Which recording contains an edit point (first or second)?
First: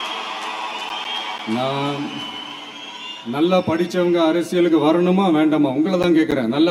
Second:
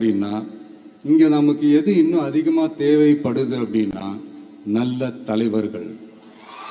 first